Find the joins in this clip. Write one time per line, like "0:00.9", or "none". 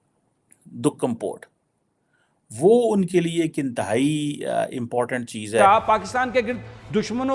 0:05.6